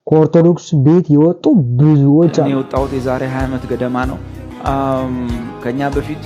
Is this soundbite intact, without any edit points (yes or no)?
no